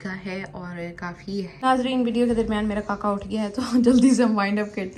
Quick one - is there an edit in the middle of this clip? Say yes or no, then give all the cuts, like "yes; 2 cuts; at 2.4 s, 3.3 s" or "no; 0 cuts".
yes; 1 cut; at 1.5 s